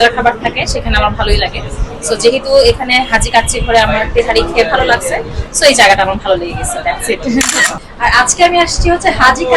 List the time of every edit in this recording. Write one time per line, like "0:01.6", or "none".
0:07.5